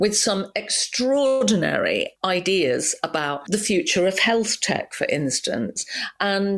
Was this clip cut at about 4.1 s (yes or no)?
no